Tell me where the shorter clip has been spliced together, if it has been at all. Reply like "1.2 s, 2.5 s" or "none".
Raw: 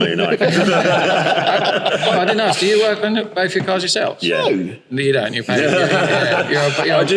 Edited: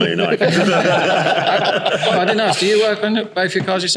none